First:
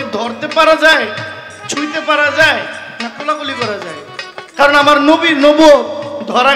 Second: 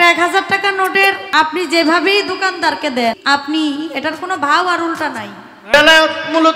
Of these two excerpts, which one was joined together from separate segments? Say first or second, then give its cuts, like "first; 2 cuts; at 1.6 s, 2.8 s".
second; 3 cuts; at 1.2 s, 3.2 s, 5.7 s